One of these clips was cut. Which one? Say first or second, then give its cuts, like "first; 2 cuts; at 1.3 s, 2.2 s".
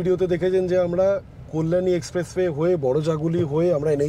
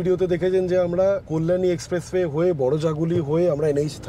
second; 1 cut; at 1.3 s